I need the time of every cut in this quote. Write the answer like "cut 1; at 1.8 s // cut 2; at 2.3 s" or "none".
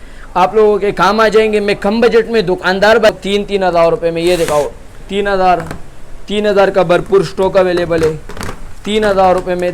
cut 1; at 3.1 s